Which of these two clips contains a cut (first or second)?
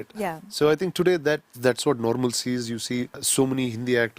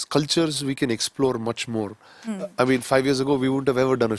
first